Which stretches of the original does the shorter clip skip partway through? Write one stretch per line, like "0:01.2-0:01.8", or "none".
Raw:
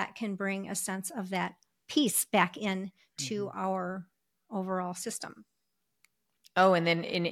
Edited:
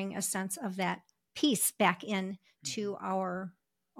none